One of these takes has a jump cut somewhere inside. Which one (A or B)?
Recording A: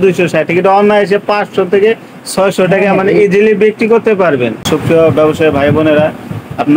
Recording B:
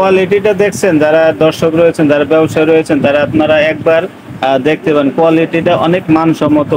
A